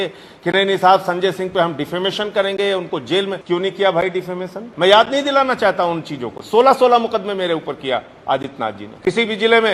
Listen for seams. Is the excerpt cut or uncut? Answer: cut